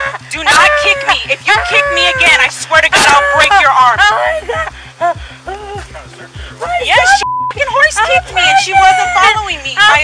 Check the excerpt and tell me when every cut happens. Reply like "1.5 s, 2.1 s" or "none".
none